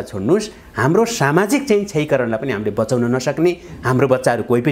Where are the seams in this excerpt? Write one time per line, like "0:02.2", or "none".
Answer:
none